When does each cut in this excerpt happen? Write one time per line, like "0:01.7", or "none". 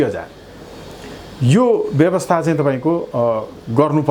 none